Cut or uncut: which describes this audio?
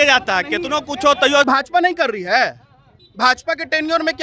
cut